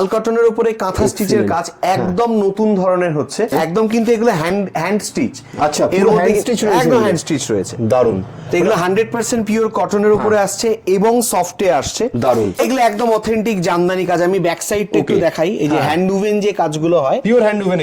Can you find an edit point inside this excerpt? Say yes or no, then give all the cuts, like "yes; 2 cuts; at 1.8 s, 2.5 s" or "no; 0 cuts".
yes; 2 cuts; at 3.5 s, 12.6 s